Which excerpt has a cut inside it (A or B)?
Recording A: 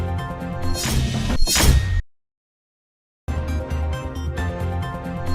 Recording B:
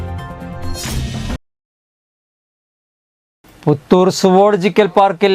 B